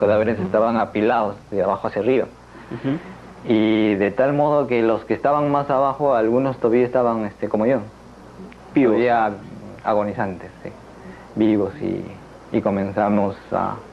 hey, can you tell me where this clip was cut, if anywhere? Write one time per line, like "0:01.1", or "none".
0:12.2